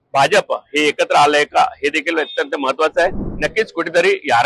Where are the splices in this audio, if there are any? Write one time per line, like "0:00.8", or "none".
0:03.3

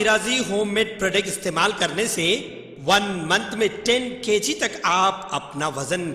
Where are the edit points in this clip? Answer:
none

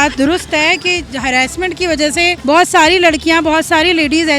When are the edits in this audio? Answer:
0:02.4

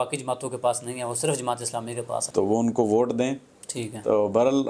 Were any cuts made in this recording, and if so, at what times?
0:02.3

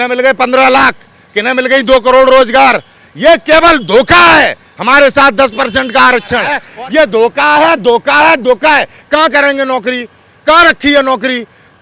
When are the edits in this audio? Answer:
0:06.6

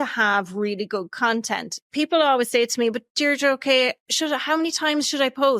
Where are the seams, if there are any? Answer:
0:01.9

